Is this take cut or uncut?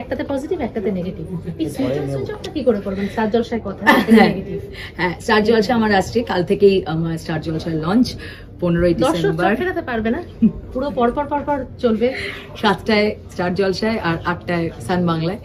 uncut